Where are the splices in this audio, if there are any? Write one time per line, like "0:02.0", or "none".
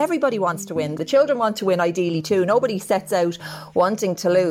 0:00.9